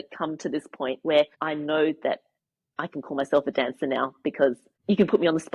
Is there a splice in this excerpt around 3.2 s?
no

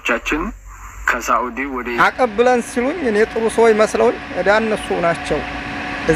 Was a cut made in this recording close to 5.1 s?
no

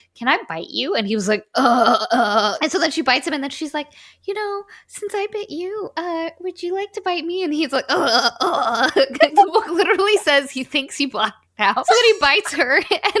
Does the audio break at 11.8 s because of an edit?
yes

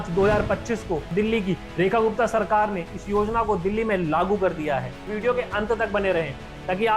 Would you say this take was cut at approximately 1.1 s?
yes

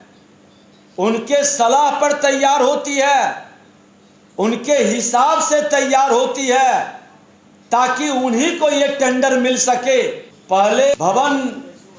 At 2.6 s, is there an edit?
no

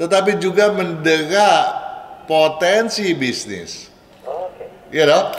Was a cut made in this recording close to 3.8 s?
no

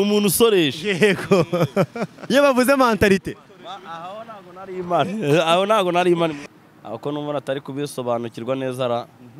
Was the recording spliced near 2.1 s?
yes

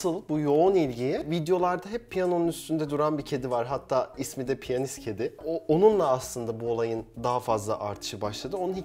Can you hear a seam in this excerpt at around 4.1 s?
no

